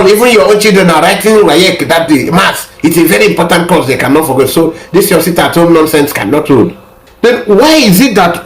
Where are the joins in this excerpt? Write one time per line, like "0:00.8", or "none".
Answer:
0:07.0